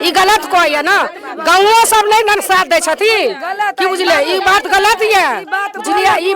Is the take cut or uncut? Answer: uncut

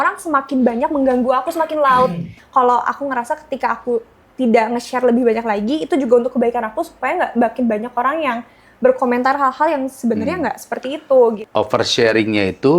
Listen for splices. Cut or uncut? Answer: cut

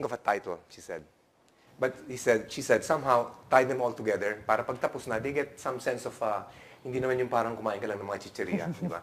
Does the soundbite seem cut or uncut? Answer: uncut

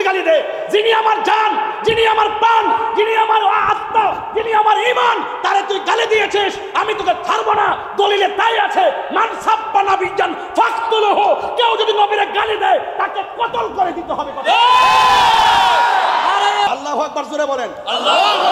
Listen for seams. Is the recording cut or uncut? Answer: cut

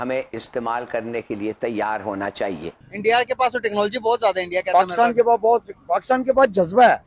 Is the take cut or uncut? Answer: cut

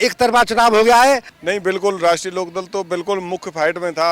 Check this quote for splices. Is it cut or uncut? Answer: cut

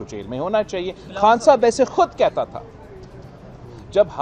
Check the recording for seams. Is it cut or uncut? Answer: uncut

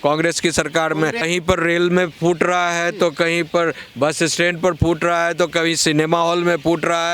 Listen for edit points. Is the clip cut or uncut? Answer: cut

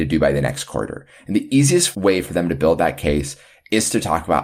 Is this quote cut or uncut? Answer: uncut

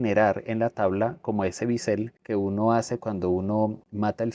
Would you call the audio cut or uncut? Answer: uncut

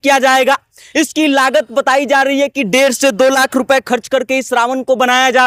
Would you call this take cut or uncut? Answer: uncut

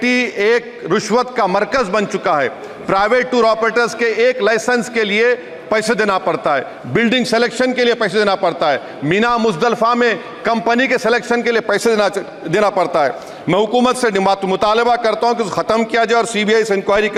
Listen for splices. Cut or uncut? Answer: uncut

